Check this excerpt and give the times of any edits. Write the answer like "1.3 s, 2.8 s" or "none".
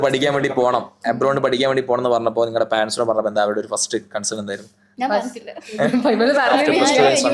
none